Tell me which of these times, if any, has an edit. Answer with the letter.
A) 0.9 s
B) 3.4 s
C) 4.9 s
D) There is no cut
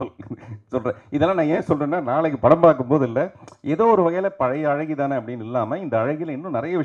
D